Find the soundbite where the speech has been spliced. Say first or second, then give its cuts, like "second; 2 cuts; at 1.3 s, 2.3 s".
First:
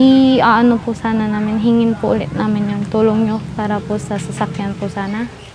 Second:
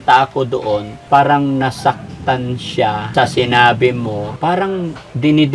second; 3 cuts; at 0.9 s, 3.1 s, 4.3 s